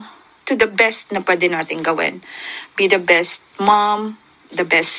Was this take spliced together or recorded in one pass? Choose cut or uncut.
uncut